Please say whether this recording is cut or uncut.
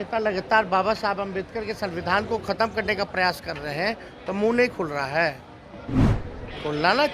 uncut